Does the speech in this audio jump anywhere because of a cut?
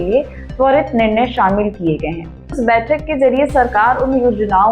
yes; 1 cut; at 2.6 s

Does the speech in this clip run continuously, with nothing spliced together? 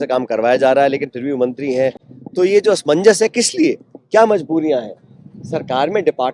yes; 0 cuts

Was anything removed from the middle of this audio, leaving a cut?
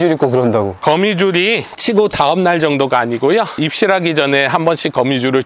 no; 0 cuts

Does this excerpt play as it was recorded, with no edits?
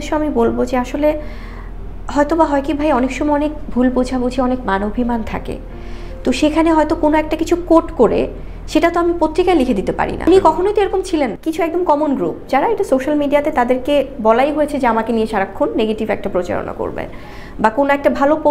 no; 1 cut; at 11.3 s

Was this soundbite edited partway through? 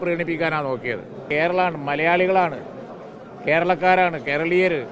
yes; 1 cut; at 1.2 s

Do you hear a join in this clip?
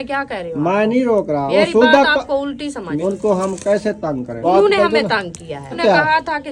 yes; 4 cuts; at 1.5 s, 2.9 s, 4.4 s, 5.8 s

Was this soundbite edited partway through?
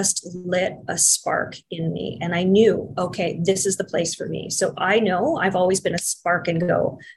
no; 0 cuts

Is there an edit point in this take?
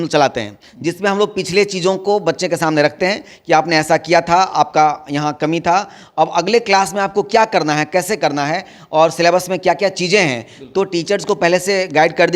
no; 0 cuts

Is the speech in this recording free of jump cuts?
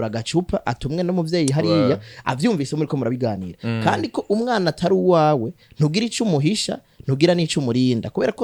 yes; 0 cuts

